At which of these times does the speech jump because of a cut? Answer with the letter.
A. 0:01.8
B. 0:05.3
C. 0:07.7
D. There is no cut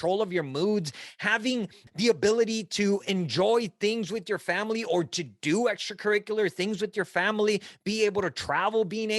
A